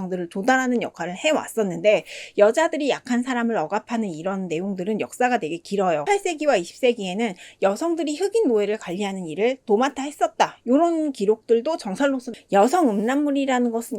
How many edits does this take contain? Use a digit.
1